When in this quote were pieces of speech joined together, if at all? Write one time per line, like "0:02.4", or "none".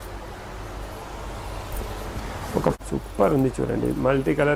0:02.8